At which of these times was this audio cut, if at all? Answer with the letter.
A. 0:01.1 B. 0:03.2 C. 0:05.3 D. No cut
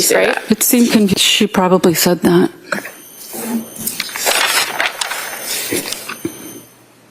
A